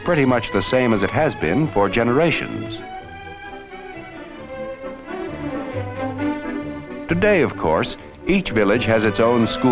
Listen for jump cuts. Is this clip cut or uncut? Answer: uncut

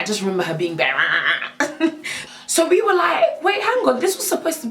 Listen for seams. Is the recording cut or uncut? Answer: cut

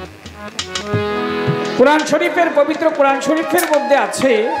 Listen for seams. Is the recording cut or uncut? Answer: uncut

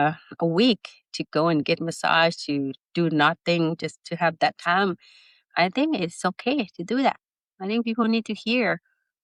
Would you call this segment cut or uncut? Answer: uncut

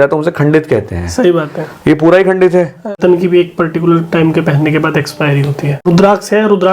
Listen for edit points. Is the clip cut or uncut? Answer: cut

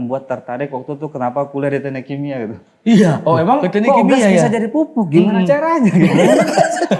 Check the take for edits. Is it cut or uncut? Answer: uncut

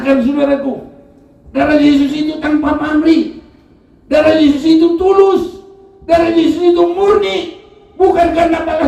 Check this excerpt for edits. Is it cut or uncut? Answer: uncut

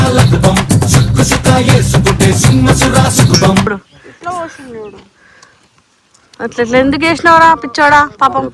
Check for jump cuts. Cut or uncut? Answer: cut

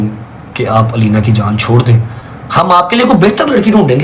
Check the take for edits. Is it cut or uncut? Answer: uncut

